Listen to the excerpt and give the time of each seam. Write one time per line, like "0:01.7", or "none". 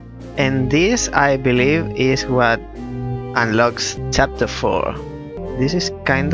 0:03.9
0:05.4